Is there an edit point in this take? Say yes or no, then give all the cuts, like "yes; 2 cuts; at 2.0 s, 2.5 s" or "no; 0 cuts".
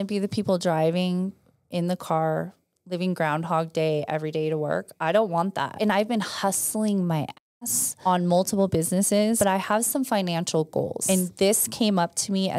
yes; 2 cuts; at 5.7 s, 11.0 s